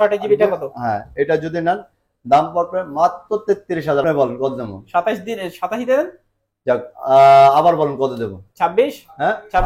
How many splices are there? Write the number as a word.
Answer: one